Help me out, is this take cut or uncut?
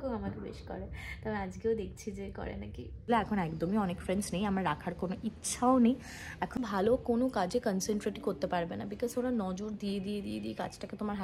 cut